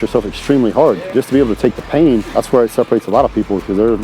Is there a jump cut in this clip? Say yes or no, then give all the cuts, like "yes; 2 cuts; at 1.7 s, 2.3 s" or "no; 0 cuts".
yes; 2 cuts; at 1.1 s, 2.3 s